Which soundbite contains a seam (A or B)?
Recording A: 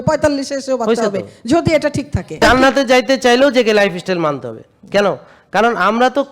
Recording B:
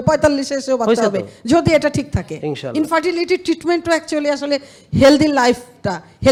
A